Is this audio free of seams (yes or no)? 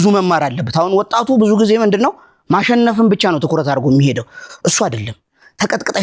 yes